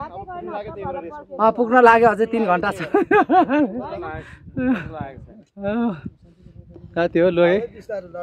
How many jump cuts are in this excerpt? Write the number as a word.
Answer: zero